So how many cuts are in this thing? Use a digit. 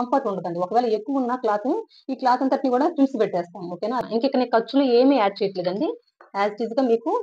1